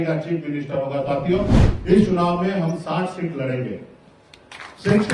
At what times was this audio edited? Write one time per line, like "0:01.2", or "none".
0:01.6